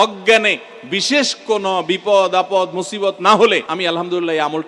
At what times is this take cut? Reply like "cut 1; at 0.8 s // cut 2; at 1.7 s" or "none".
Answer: cut 1; at 3.7 s